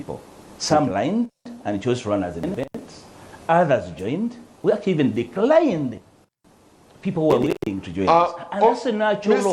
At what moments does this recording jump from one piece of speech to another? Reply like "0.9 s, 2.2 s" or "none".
none